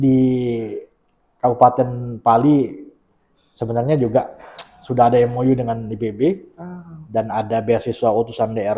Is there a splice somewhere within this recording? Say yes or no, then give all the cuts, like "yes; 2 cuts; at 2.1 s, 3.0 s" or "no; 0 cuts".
no; 0 cuts